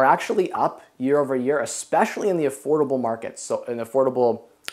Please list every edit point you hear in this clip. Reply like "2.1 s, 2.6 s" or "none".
none